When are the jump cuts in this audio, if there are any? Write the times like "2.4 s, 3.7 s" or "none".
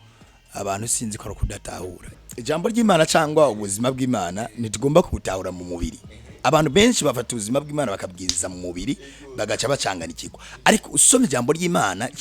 2.1 s